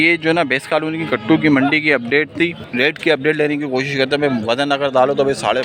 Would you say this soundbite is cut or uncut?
cut